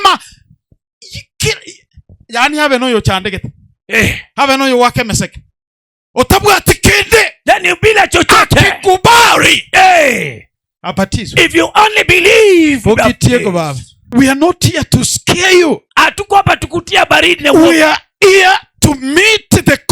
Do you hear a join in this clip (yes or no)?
yes